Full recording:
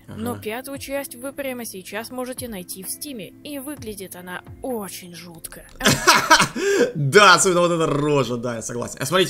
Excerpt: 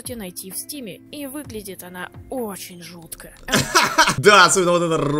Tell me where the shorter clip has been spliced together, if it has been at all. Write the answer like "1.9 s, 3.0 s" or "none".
4.2 s

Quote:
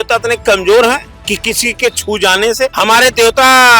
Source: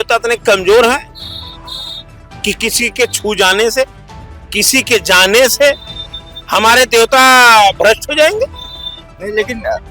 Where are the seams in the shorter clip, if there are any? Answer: 1.1 s, 2.7 s

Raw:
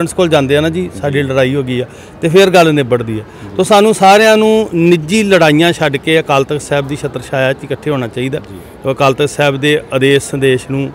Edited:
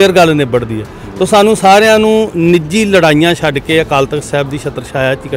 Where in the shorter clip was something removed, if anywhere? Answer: none

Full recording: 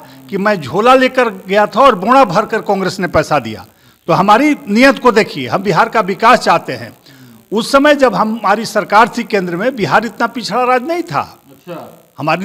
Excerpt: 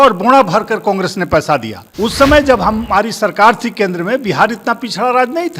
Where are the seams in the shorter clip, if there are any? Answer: 1.8 s

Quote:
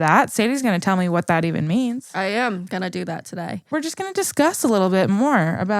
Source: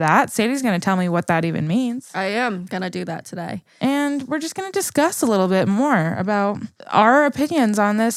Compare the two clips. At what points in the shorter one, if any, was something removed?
3.7 s

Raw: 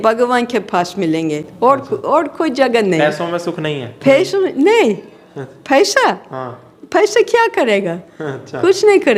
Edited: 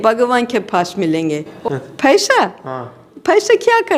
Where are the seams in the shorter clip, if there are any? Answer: 1.5 s

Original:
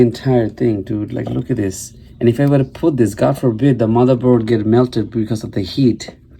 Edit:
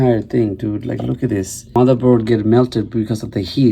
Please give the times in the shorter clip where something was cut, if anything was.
1.7 s

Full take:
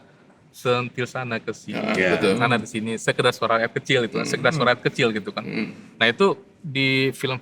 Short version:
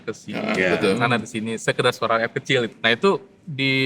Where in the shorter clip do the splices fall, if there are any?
2.7 s

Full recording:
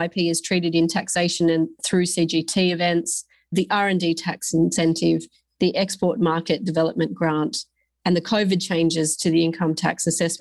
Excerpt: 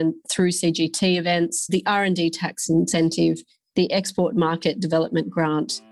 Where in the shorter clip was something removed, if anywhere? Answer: 1.6 s

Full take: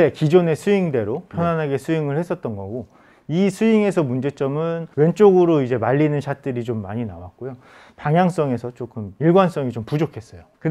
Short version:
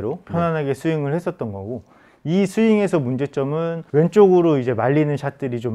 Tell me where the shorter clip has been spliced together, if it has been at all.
none

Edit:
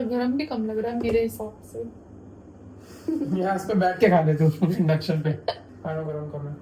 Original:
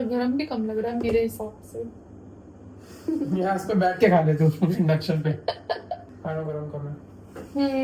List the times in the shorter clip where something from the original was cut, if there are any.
5.6 s

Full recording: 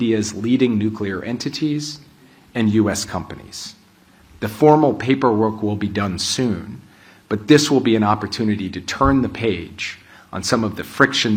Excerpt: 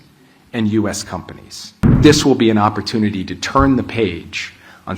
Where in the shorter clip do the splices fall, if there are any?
2.0 s

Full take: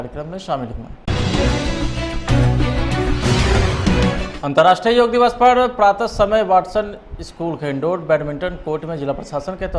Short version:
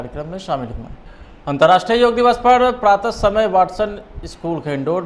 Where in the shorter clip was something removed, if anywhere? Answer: 1.2 s

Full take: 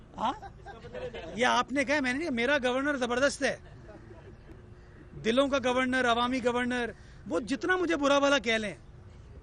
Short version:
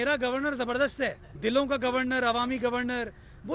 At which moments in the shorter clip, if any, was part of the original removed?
1.3 s

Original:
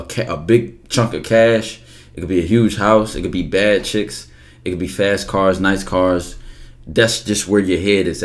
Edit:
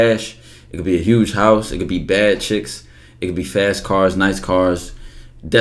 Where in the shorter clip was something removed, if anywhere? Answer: none

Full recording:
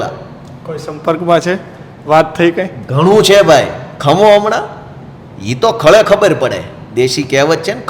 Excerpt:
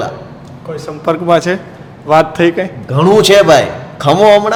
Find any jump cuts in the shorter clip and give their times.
none

